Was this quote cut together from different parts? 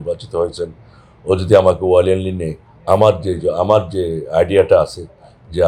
no; 0 cuts

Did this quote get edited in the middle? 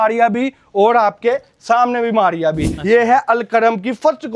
yes; 1 cut; at 2.7 s

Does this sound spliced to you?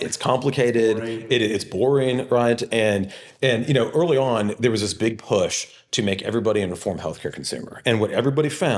no; 0 cuts

